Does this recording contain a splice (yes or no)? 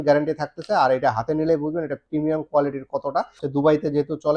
yes